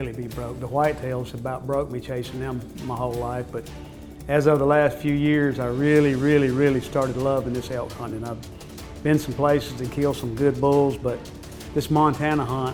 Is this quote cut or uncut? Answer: uncut